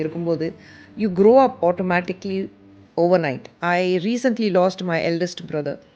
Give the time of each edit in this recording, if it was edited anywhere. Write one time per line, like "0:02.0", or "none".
0:03.5